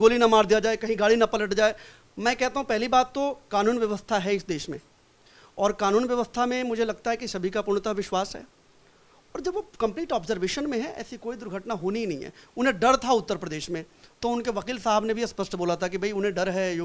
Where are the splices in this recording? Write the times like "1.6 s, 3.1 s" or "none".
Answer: none